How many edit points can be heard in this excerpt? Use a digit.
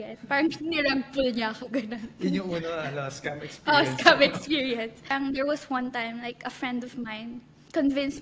1